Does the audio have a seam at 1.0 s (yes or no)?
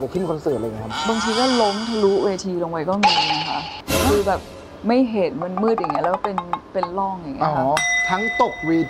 yes